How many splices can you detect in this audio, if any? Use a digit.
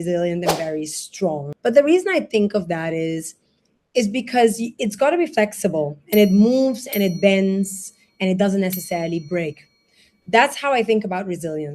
1